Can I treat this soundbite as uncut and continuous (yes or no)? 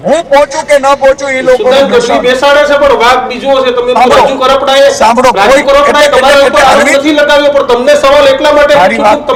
yes